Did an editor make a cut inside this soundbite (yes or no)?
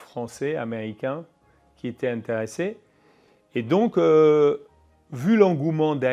no